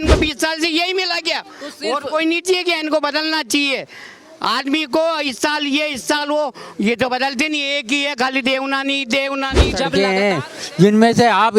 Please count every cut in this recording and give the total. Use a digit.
1